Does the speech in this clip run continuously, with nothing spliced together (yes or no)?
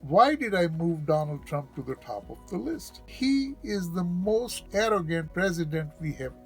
no